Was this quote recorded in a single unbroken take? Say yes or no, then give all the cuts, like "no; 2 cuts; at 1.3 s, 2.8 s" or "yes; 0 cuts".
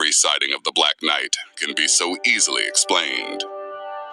yes; 0 cuts